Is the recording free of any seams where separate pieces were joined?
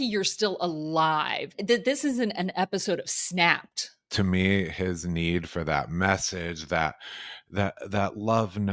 no; 2 cuts; at 1.6 s, 4.1 s

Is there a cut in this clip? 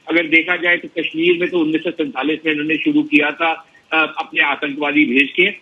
no; 0 cuts

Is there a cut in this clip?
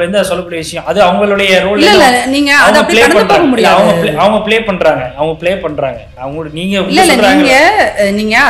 yes; 1 cut; at 6.1 s

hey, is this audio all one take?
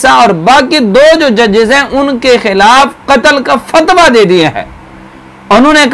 yes; 0 cuts

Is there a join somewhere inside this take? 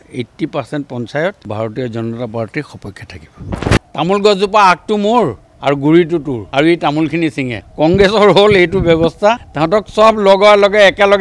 yes; 4 cuts; at 1.4 s, 3.6 s, 6.4 s, 9.5 s

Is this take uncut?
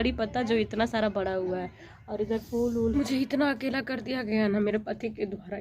no; 1 cut; at 2.9 s

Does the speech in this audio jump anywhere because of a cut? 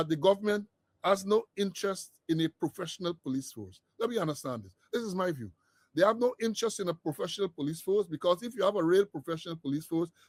no; 0 cuts

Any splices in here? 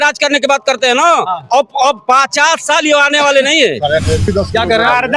yes; 1 cut; at 4.3 s

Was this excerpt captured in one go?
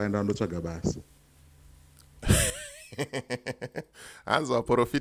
yes; 0 cuts

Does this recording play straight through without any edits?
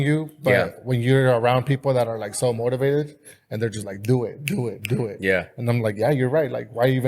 yes; 0 cuts

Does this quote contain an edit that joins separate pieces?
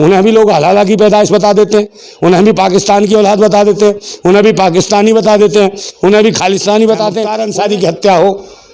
yes; 1 cut; at 7.4 s

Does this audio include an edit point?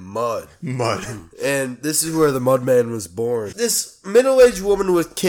yes; 1 cut; at 3.5 s

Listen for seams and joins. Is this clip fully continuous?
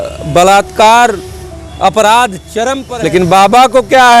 no; 1 cut; at 2.8 s

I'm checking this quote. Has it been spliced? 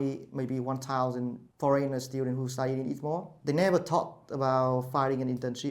yes; 2 cuts; at 1.4 s, 3.3 s

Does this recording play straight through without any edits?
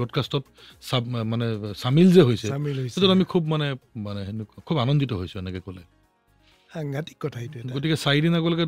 yes; 0 cuts

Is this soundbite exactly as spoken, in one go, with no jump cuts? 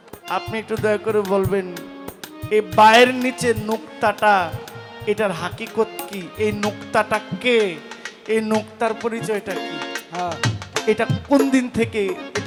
yes; 0 cuts

